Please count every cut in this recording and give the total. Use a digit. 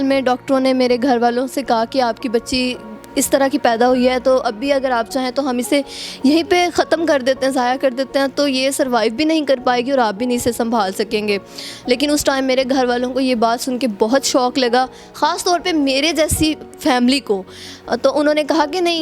0